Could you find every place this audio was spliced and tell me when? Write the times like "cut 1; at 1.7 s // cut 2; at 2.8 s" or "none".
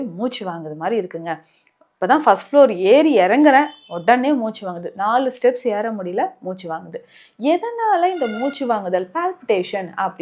none